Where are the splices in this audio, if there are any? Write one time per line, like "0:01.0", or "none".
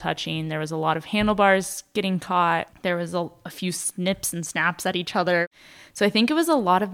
0:02.7
0:05.4